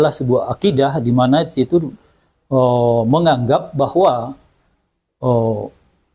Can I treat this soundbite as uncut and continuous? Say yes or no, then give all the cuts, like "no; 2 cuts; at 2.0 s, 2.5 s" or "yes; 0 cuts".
yes; 0 cuts